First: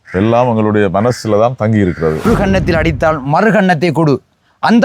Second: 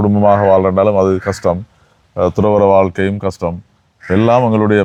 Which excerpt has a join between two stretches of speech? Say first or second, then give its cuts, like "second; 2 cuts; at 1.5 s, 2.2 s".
first; 1 cut; at 2.2 s